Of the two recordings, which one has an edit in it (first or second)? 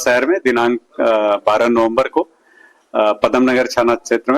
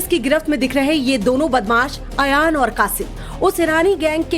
second